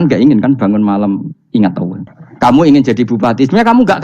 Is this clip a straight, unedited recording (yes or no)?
no